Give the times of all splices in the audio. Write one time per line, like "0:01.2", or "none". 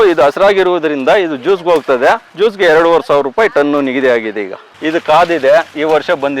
0:04.7